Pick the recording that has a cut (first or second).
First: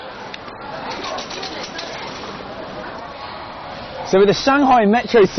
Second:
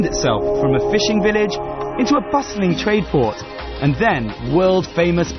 first